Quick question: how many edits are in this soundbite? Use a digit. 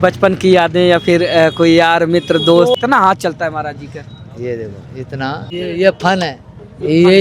2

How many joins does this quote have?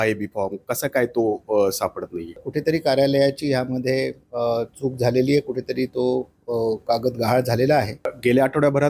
2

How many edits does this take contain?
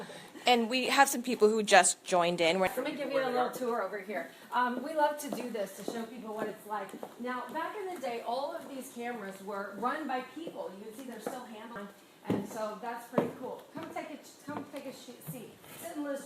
2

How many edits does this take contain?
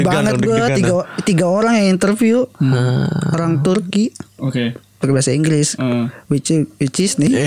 0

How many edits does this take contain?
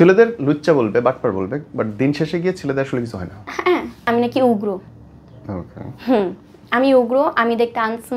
1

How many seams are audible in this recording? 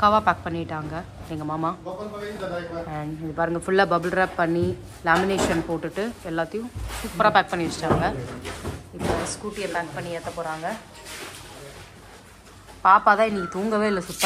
0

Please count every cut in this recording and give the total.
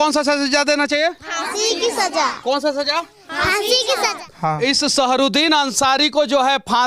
1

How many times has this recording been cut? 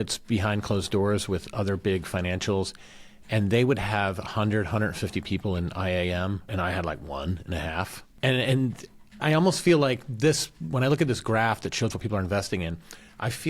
3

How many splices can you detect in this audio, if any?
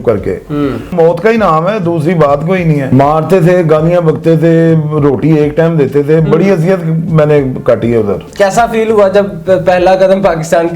3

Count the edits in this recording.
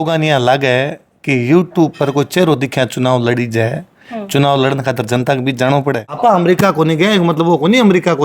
1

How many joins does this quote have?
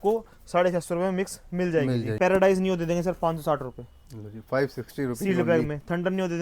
1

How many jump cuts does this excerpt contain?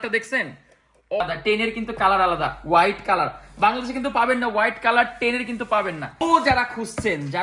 2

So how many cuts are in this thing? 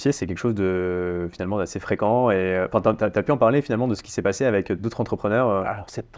0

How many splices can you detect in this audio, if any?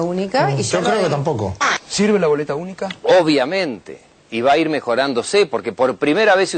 0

